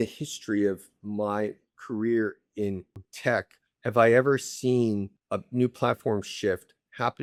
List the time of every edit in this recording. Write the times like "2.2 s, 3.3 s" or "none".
none